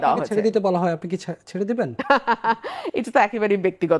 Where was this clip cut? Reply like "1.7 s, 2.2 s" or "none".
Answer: none